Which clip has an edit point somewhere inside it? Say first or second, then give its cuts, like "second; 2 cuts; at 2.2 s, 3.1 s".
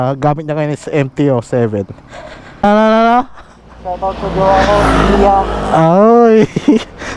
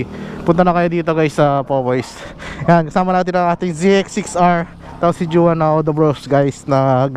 first; 1 cut; at 2.6 s